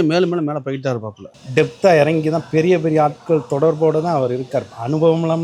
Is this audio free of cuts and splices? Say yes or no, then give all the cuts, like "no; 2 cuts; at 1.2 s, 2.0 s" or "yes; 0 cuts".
no; 1 cut; at 1.4 s